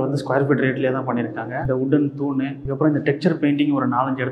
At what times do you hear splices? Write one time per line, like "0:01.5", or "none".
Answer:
0:01.6
0:02.6